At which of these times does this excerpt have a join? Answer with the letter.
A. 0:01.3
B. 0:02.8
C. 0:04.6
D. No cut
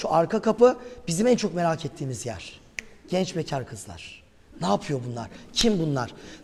D